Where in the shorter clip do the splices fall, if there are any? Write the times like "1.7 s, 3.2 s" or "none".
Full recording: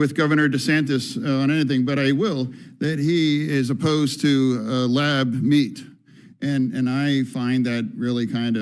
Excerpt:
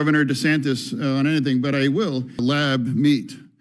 2.4 s